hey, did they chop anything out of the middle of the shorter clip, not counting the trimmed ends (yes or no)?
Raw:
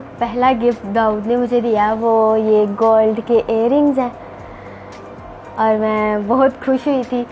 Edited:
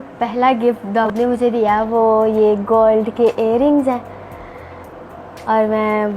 yes